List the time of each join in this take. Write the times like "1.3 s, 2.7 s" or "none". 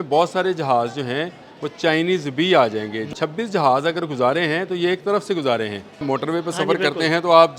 3.1 s, 6.0 s